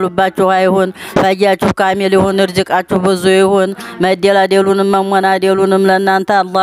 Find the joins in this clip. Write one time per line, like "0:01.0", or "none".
none